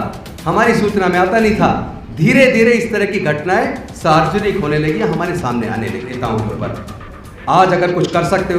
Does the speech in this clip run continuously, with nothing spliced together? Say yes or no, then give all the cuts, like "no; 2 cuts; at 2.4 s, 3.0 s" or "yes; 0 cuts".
no; 1 cut; at 6.1 s